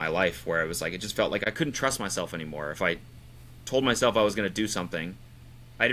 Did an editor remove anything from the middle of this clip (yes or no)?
yes